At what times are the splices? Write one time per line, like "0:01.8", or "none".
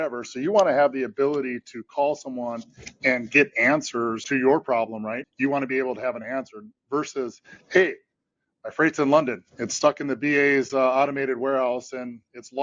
0:04.2
0:05.2